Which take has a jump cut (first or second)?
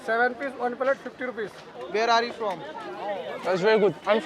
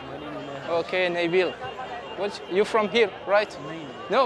first